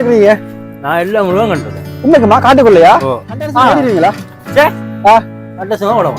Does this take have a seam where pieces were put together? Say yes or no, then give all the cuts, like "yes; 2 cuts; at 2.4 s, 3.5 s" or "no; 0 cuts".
yes; 1 cut; at 3.7 s